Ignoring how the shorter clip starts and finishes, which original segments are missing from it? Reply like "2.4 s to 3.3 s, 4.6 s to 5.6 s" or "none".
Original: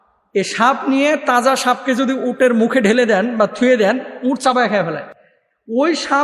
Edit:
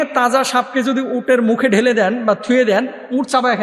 none